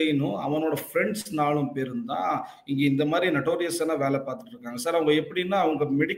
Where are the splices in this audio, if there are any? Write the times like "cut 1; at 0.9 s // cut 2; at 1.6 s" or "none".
none